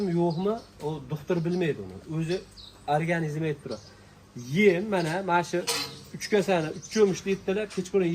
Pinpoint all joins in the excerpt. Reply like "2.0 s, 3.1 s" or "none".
none